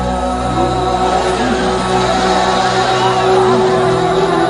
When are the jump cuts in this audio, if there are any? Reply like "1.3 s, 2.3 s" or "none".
1.5 s